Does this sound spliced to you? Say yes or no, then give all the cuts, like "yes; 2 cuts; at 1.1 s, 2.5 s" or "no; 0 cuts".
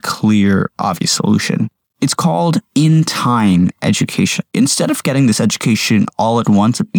yes; 2 cuts; at 1.8 s, 4.5 s